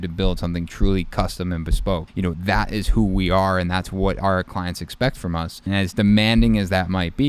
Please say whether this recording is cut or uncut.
cut